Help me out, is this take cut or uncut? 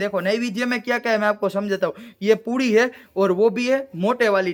uncut